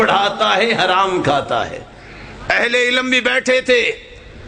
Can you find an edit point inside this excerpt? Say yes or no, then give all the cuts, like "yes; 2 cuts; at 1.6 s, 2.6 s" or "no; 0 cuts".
no; 0 cuts